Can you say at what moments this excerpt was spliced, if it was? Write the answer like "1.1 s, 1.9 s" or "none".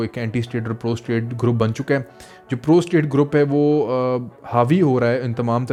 none